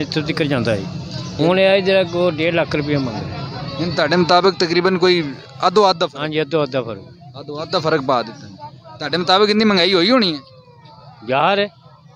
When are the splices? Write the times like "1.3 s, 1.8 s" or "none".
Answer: none